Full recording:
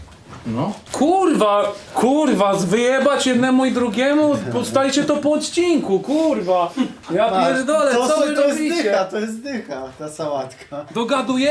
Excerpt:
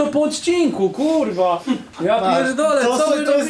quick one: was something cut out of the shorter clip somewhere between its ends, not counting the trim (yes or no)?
no